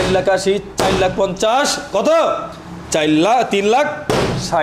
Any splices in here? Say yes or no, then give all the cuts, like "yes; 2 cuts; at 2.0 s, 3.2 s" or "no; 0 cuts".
no; 0 cuts